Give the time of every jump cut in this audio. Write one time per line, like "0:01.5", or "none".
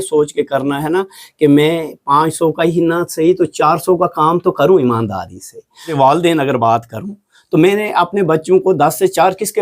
0:05.9